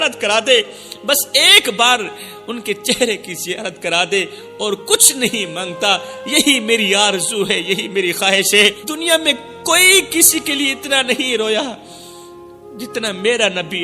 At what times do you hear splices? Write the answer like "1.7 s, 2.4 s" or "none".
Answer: 8.6 s

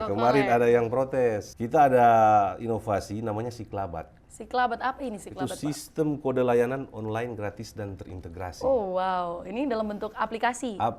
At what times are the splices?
1.5 s

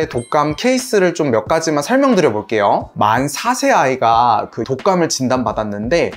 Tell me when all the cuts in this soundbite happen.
2.9 s, 4.6 s

